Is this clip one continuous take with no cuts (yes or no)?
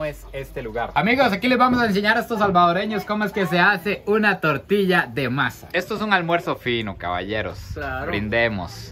no